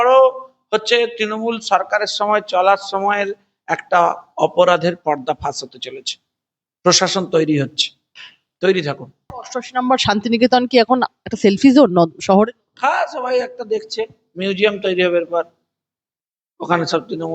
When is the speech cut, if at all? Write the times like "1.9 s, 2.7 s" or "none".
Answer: 9.1 s